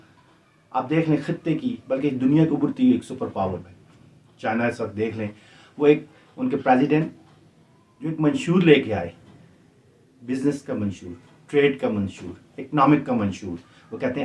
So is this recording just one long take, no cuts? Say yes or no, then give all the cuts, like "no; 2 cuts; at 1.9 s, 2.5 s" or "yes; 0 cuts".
yes; 0 cuts